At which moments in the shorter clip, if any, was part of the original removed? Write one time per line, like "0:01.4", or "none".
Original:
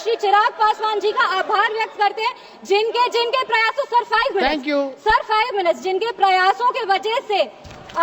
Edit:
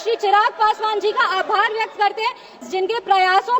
0:02.7

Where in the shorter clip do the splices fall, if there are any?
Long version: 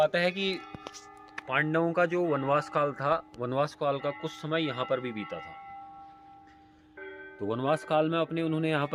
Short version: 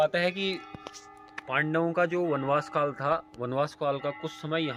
none

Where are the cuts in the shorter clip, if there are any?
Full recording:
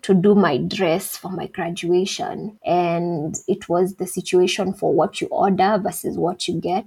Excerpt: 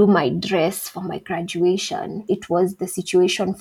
0:02.2

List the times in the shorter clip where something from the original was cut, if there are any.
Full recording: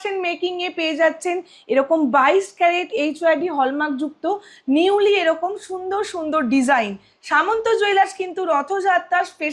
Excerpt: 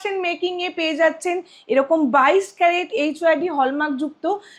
none

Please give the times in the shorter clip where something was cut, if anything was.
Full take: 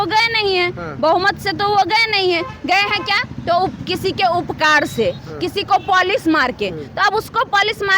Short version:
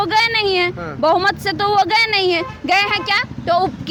none

